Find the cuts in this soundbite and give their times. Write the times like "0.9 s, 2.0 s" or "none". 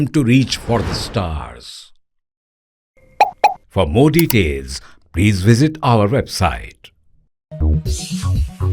7.3 s

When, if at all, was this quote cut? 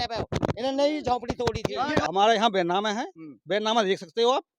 2.1 s

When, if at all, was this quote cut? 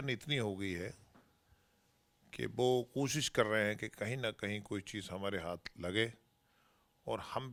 none

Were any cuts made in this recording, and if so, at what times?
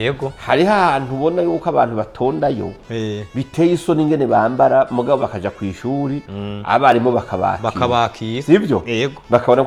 none

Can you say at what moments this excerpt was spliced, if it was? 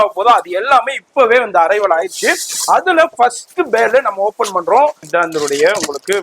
5.0 s

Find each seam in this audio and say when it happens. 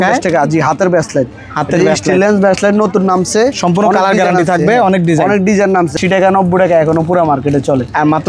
6.0 s

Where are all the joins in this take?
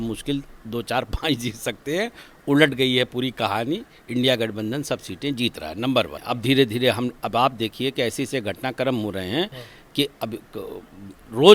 none

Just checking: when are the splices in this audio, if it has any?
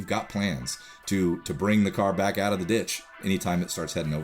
3.2 s

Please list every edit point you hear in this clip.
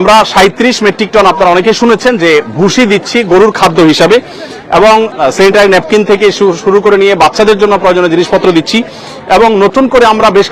none

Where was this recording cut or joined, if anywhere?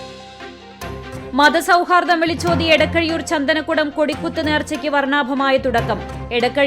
1.3 s

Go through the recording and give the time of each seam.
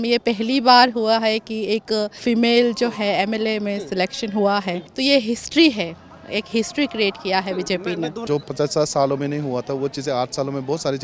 2.2 s, 4.9 s, 8.4 s

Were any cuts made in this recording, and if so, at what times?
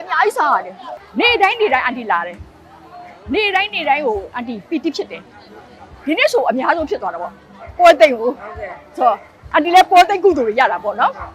1.0 s

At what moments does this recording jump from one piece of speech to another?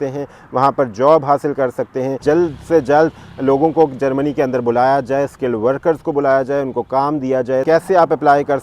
2.2 s, 7.6 s

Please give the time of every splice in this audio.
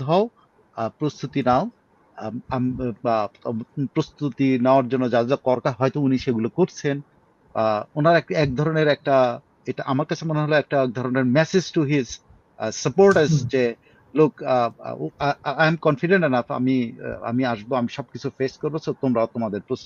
none

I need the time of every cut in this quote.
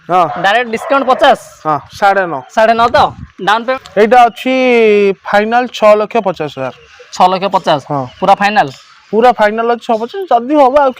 3.8 s

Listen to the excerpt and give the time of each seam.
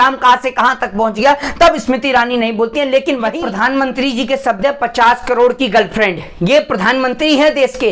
3.3 s

